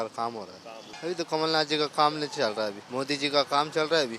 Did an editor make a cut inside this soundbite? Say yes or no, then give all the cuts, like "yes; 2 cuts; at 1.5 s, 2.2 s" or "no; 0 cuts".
yes; 2 cuts; at 0.9 s, 2.8 s